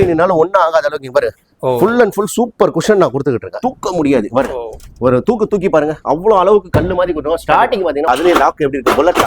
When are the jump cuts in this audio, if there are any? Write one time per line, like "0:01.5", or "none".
0:03.6
0:08.0